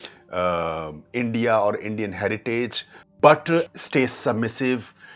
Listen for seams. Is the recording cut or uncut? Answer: uncut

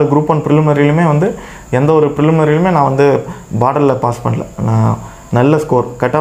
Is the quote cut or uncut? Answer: uncut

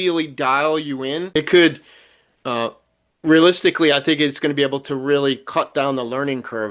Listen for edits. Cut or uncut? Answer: cut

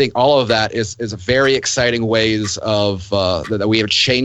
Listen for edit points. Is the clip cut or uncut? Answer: uncut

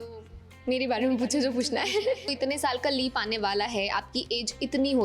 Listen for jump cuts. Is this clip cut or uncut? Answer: cut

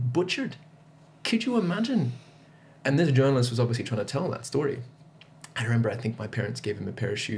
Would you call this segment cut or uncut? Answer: uncut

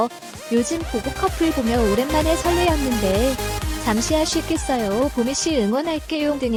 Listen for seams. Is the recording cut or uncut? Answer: uncut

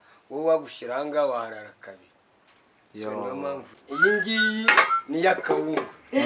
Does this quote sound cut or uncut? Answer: cut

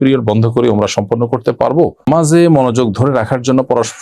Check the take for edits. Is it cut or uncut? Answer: cut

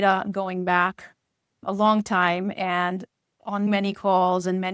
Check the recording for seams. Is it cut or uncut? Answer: uncut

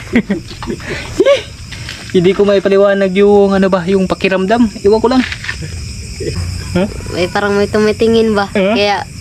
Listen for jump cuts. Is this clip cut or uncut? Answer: cut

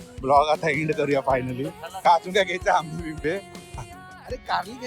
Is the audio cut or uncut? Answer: cut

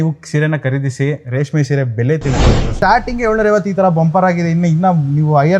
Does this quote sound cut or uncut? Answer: cut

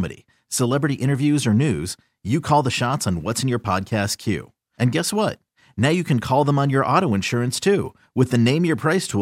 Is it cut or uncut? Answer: uncut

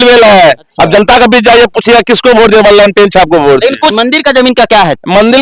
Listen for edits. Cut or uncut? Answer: cut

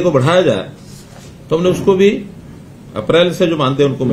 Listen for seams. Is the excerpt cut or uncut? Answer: uncut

